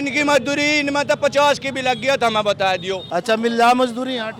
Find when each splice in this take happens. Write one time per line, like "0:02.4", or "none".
0:03.0